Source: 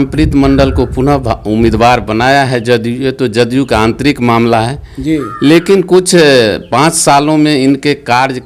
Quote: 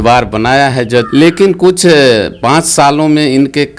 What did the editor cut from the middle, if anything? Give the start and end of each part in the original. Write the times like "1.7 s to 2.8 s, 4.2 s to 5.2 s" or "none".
2.8 s to 5.4 s